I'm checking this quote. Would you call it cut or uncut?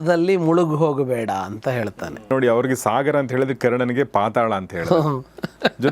cut